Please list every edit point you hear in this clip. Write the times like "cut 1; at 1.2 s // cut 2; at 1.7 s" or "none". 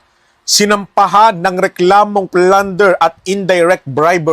cut 1; at 3.0 s